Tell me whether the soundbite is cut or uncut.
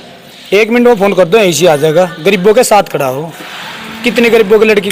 uncut